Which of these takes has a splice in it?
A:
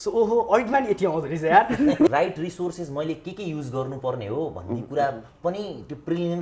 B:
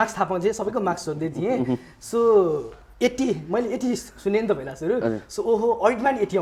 A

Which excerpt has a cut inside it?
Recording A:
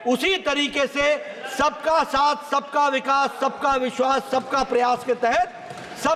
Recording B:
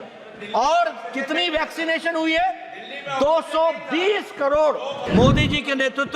B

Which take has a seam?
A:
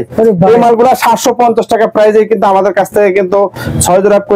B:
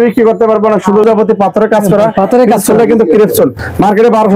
B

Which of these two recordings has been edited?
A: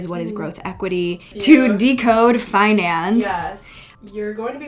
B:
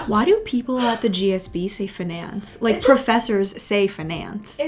A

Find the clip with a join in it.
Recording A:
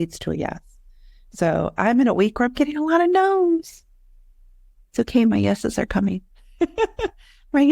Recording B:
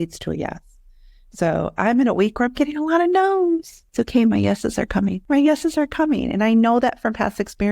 B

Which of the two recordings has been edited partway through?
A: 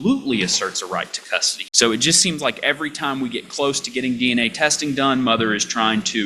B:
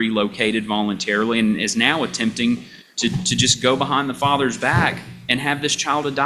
A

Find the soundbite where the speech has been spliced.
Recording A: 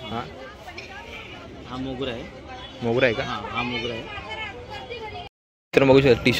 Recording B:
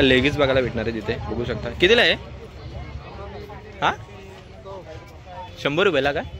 A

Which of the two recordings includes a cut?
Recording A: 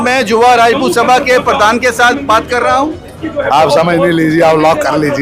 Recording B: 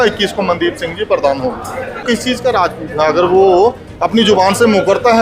B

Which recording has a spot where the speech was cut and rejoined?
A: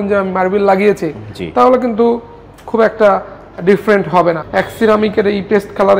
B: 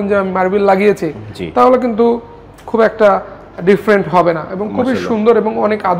A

